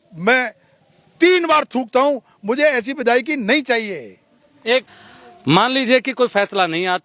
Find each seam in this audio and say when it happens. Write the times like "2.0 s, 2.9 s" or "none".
4.9 s